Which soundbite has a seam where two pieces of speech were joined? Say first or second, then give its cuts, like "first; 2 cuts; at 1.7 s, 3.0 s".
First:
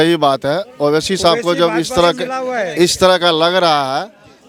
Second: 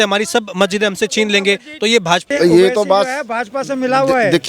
second; 1 cut; at 2.3 s